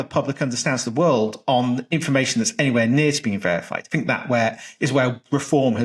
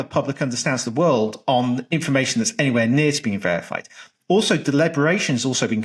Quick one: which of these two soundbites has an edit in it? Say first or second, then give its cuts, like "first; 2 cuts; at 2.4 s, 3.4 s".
first; 1 cut; at 3.9 s